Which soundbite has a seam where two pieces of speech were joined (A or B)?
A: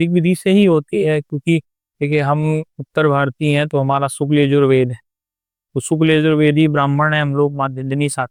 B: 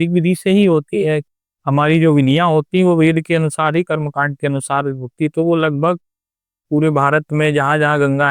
B